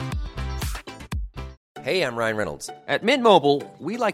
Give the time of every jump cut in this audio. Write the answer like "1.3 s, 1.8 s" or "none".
1.6 s